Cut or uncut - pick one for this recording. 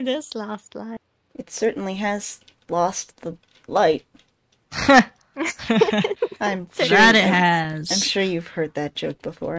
cut